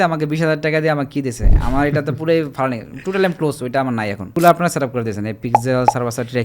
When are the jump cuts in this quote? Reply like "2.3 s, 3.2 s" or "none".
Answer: 4.3 s